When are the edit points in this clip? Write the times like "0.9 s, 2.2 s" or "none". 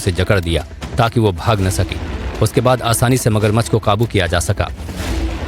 1.6 s